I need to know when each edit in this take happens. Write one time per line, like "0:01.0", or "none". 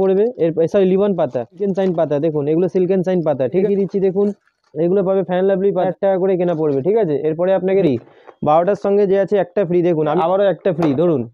0:01.6
0:03.6
0:05.9
0:07.8
0:10.2